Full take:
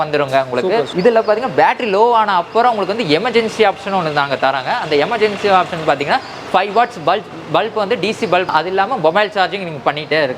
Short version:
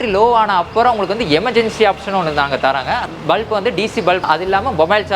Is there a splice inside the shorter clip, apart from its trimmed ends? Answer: yes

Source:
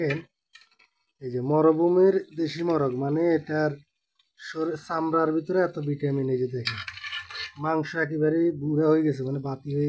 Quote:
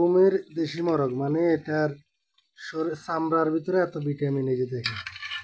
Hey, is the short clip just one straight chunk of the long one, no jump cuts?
yes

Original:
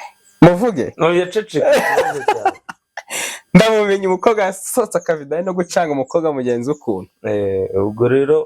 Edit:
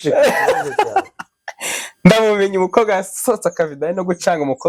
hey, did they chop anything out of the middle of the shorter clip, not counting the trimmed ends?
no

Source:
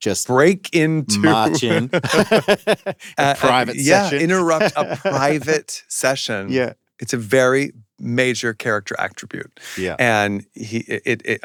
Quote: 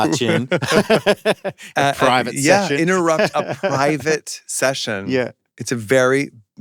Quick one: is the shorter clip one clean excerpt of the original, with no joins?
yes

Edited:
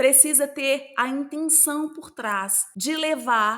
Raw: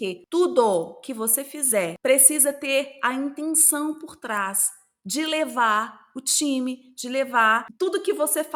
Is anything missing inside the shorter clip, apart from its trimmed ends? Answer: yes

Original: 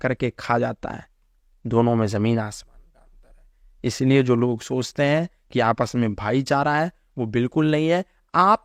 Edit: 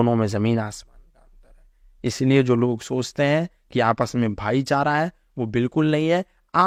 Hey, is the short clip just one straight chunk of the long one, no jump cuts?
yes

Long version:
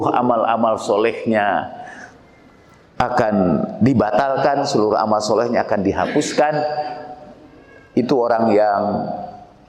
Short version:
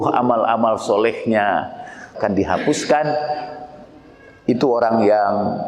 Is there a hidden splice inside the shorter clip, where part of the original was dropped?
yes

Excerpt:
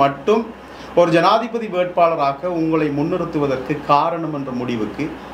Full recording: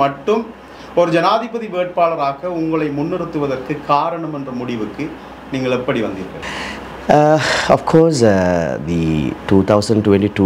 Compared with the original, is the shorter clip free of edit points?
yes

